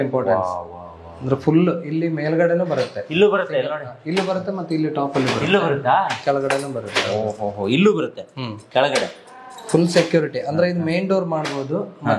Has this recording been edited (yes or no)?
no